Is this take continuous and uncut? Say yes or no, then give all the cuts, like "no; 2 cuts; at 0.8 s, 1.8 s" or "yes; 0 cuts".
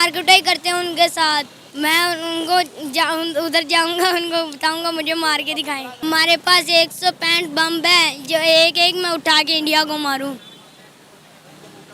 yes; 0 cuts